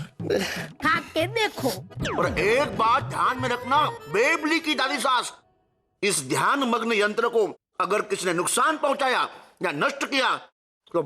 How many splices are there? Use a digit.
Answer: 1